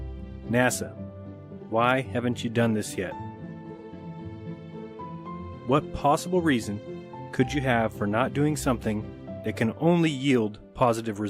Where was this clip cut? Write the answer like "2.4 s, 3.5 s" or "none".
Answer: 7.9 s